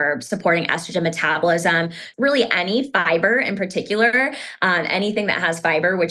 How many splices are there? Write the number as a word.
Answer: one